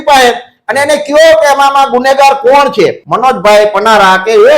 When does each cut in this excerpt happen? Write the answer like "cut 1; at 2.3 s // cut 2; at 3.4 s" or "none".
cut 1; at 3.0 s